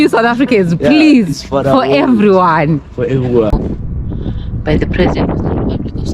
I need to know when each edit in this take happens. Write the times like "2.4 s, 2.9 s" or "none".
3.5 s